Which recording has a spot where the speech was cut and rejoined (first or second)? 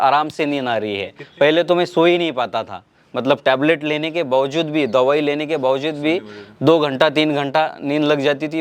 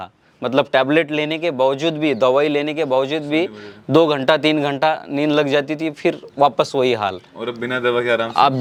first